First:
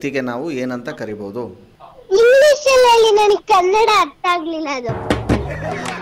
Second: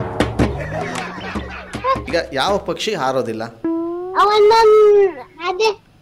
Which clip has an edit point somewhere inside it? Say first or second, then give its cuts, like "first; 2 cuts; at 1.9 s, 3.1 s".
second; 1 cut; at 2.0 s